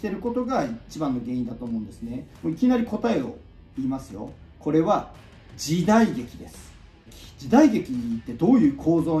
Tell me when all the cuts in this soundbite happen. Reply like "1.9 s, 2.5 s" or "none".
2.3 s, 4.3 s, 7.1 s

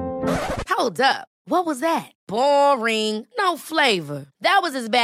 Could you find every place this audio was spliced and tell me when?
none

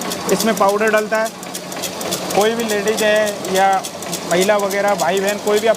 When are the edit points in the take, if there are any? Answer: none

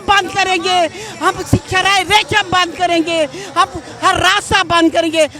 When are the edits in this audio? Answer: none

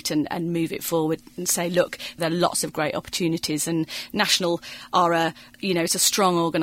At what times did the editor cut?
2.2 s, 5.4 s

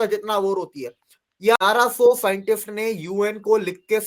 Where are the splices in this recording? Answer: 1.6 s

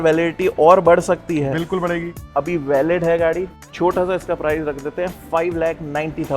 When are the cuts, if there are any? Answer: 2.2 s, 3.6 s

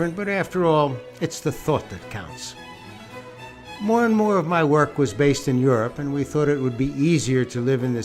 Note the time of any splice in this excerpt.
5.9 s

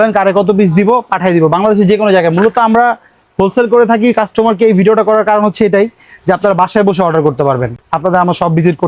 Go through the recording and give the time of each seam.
none

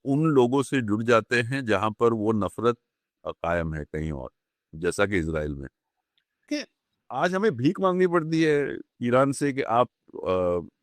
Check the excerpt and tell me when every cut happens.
6.5 s

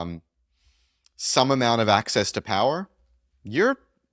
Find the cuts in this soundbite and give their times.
none

